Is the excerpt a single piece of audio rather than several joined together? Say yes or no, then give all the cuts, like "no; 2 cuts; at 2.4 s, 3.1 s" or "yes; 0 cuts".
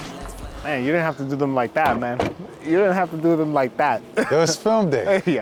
yes; 0 cuts